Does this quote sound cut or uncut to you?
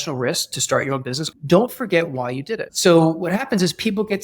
cut